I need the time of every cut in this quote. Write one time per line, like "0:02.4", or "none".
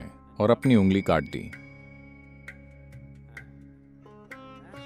none